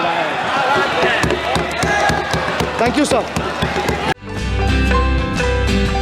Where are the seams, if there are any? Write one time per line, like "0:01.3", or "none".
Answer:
none

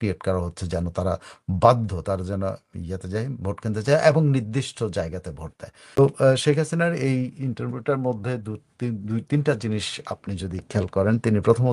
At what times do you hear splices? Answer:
0:06.0

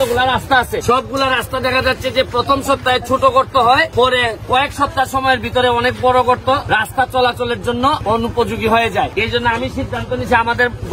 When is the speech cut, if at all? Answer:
0:00.8
0:03.9
0:06.6
0:08.0
0:09.1

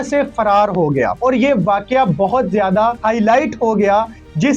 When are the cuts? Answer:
0:01.1
0:03.0

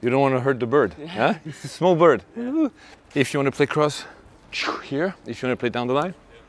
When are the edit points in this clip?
0:03.0

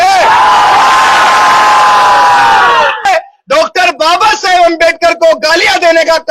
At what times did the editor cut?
0:03.0

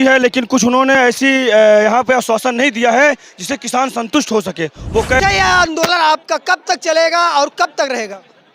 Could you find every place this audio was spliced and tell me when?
0:05.2

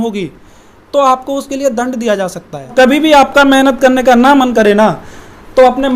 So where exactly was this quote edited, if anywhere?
0:02.7

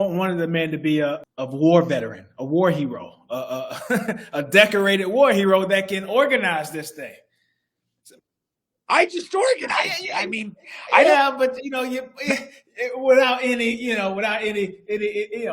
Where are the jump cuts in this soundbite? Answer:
0:01.2

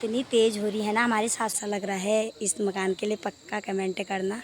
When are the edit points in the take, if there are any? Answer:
0:01.6

